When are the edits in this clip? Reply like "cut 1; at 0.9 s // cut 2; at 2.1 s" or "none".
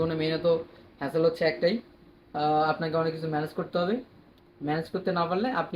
none